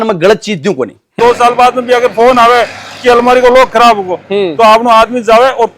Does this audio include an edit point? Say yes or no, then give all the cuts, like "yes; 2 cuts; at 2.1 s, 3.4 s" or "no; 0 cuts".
yes; 1 cut; at 1.2 s